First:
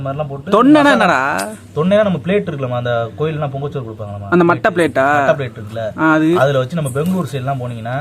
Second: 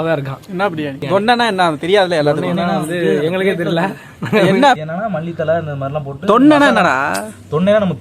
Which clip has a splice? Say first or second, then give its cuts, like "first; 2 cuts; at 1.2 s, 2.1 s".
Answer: second; 2 cuts; at 1.0 s, 4.8 s